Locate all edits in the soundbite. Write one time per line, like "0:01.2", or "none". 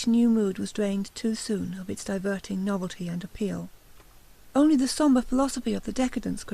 0:02.7

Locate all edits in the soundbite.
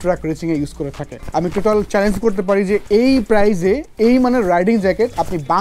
0:01.1

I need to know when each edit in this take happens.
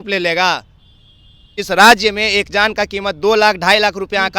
0:01.6

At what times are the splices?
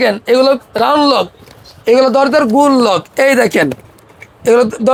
none

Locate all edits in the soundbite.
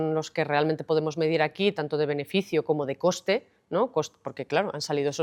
none

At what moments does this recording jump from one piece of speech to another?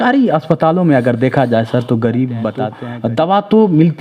0:02.8

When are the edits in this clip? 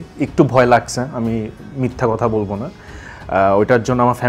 none

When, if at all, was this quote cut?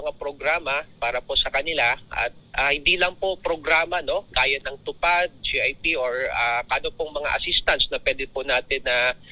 none

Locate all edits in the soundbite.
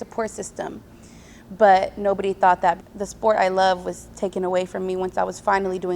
0:02.8

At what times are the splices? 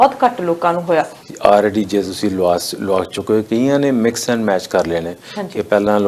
0:01.2

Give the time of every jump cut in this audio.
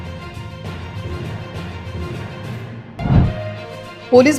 0:02.4

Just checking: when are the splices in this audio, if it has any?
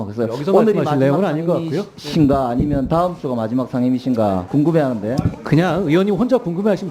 0:04.4

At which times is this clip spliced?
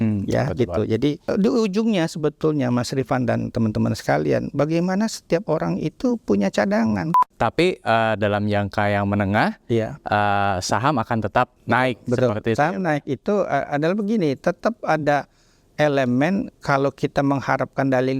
0:01.2
0:07.1
0:11.6

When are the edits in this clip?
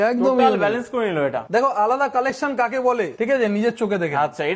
0:01.4

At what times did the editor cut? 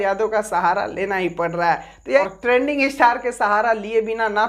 0:02.0

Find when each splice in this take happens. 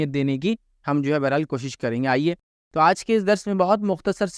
none

